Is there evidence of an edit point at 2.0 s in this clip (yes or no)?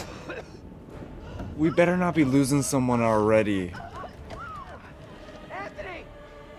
no